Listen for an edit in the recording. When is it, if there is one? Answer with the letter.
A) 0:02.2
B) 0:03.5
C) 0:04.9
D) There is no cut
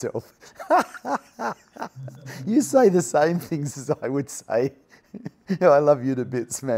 D